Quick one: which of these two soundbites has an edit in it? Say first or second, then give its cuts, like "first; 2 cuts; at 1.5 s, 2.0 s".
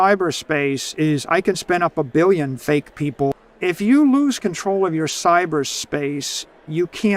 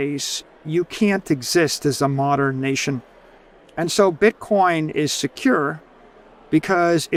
first; 1 cut; at 3.3 s